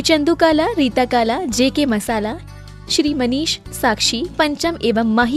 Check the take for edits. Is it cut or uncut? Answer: uncut